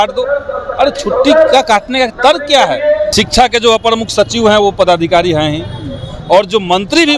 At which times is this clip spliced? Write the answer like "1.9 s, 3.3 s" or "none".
3.1 s